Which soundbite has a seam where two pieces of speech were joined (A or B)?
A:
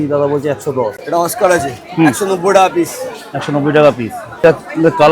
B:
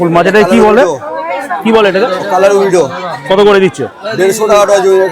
A